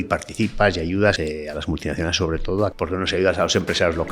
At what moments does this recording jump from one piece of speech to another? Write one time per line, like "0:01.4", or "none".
0:01.2
0:02.7